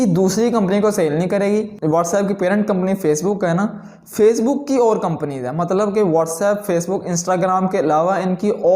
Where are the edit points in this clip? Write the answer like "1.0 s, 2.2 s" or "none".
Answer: 1.8 s